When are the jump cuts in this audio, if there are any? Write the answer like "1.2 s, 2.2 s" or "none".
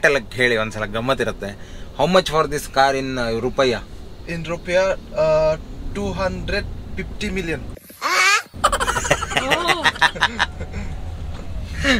none